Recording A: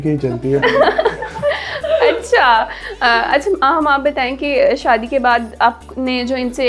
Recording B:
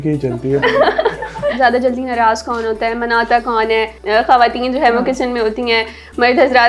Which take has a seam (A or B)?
B